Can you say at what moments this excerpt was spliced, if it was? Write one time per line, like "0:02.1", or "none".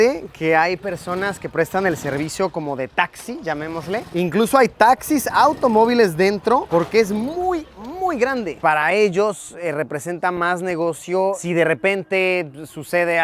0:04.0
0:08.6
0:11.4